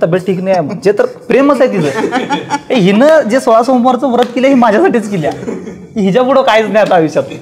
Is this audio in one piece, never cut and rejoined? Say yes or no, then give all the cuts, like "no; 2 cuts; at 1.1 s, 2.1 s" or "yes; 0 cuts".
yes; 0 cuts